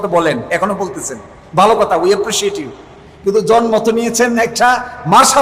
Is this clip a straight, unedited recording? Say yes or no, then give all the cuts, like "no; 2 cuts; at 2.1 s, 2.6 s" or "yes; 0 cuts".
yes; 0 cuts